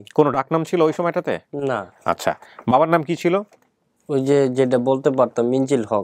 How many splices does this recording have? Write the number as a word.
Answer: zero